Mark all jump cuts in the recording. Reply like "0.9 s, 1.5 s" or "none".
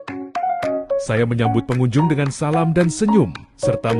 1.0 s